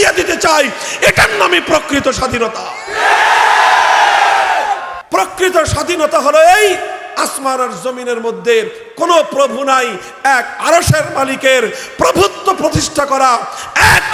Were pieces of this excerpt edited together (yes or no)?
yes